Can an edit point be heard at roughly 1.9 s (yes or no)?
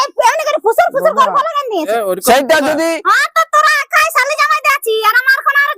yes